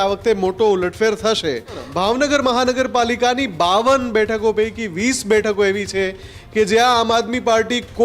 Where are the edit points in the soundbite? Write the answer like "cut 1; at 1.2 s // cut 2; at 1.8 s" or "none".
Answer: cut 1; at 1.9 s